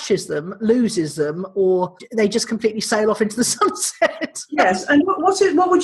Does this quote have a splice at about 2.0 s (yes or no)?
yes